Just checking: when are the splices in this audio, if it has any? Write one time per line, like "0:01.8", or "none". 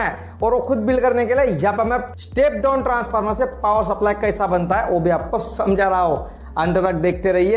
none